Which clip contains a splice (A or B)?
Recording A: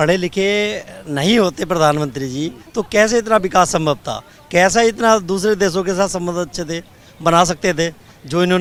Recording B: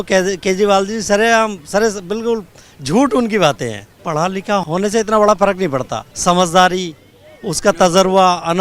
B